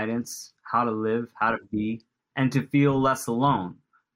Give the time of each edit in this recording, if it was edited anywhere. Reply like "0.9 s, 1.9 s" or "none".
2.2 s